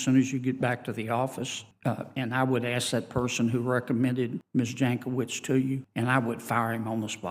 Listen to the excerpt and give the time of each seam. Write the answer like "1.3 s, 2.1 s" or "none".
1.6 s, 4.4 s, 5.9 s